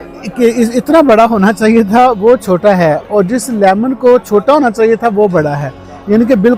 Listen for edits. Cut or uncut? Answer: uncut